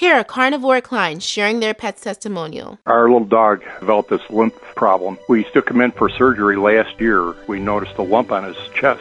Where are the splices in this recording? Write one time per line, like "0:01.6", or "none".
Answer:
0:02.7